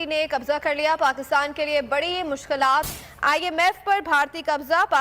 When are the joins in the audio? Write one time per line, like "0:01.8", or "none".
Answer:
0:02.9